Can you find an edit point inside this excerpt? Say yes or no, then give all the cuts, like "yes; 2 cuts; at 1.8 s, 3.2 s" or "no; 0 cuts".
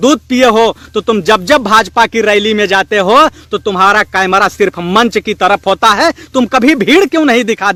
no; 0 cuts